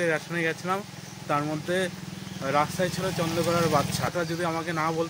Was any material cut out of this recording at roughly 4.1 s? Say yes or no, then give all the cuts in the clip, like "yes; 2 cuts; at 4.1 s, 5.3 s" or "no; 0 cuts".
yes; 1 cut; at 4.1 s